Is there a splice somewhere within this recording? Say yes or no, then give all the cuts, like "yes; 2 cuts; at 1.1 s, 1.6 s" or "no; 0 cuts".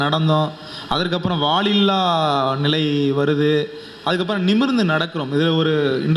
no; 0 cuts